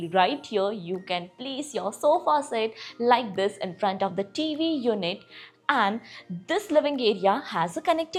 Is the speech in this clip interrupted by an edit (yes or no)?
no